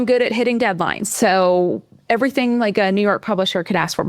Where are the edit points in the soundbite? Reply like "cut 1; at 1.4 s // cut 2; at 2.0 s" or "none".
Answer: cut 1; at 1.0 s